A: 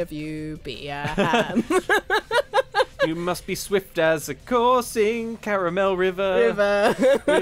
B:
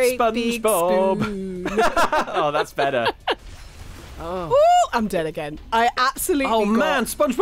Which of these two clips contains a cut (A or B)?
B